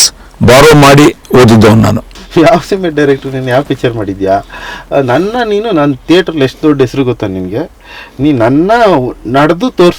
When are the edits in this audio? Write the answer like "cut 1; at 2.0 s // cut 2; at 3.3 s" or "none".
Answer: cut 1; at 2.1 s